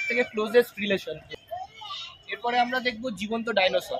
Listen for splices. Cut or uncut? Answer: cut